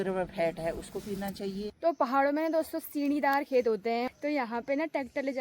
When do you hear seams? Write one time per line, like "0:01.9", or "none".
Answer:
0:01.8
0:04.1